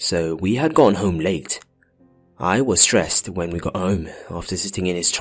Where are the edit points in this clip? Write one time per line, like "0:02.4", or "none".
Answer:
none